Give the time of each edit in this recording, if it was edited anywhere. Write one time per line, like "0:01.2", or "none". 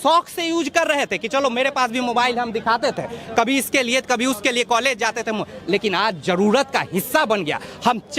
none